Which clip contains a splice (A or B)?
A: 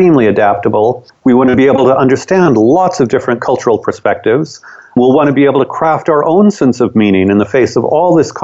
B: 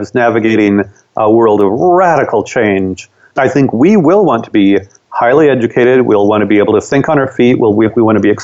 A